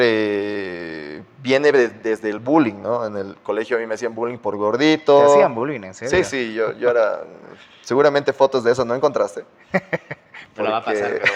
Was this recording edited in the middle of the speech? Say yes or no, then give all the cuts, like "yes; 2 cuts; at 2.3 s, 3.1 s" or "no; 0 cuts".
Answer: no; 0 cuts